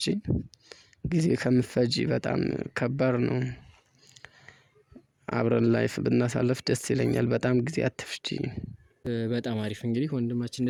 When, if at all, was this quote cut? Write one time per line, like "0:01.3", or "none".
none